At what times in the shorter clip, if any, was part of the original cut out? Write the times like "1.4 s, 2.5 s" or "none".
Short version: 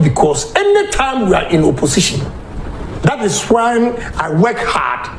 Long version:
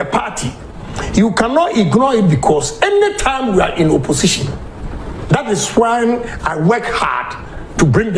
none